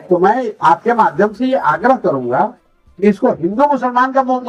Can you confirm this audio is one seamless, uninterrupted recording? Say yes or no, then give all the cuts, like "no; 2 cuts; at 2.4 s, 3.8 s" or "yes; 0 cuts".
yes; 0 cuts